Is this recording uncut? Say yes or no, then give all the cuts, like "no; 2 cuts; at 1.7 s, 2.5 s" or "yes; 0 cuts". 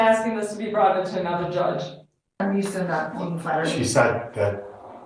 no; 1 cut; at 2.4 s